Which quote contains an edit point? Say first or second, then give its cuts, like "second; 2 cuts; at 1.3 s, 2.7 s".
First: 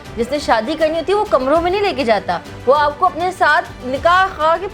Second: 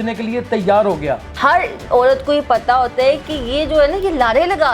second; 1 cut; at 1.3 s